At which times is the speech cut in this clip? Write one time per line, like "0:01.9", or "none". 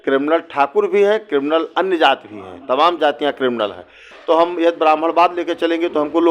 0:04.1